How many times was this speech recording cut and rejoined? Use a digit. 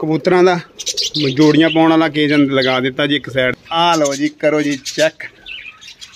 1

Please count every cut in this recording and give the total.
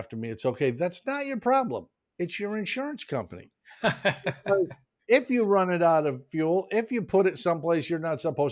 0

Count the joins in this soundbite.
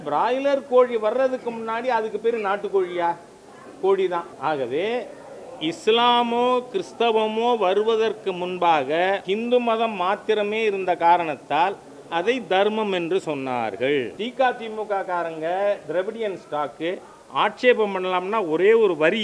3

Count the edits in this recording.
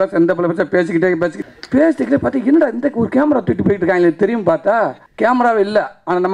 2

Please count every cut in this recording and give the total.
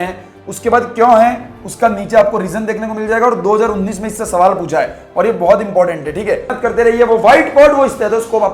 1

